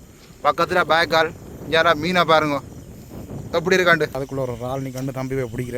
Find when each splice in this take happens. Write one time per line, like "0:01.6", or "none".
0:04.2